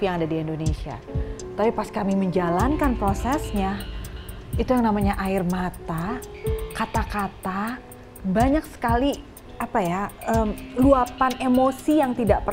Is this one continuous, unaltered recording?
yes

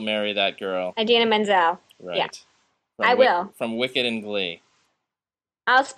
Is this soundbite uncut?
no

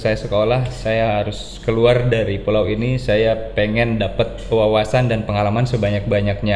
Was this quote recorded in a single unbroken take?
yes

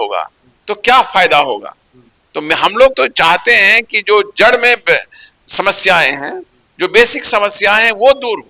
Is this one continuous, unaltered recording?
yes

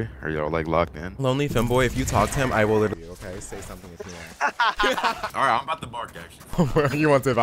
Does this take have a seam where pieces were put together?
yes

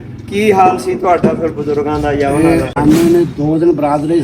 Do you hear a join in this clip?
yes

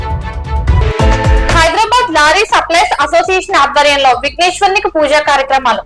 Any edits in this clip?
yes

